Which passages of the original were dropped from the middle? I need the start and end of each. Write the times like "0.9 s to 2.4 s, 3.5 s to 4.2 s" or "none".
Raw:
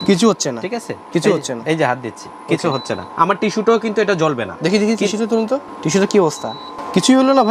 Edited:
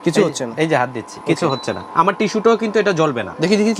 2.2 s to 2.3 s